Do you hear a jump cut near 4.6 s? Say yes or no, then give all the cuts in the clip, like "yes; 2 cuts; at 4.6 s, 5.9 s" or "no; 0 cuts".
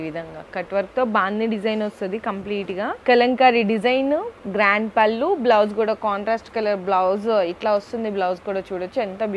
no; 1 cut; at 2.9 s